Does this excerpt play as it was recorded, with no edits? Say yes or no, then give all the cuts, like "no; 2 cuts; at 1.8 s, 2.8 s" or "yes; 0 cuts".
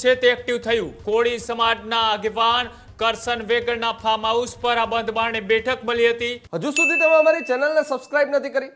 no; 2 cuts; at 1.0 s, 6.4 s